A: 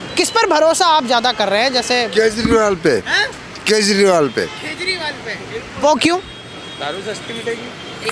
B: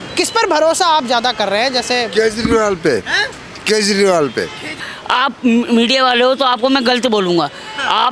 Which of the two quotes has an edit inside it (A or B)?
B